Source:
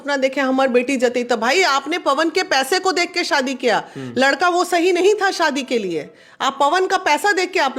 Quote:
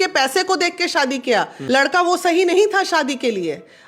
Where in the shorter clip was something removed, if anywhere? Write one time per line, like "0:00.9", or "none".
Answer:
0:01.6